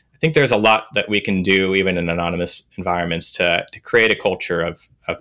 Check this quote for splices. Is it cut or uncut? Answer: uncut